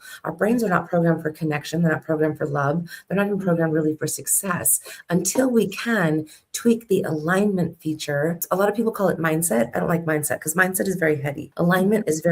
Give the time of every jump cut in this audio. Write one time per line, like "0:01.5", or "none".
0:08.4
0:11.4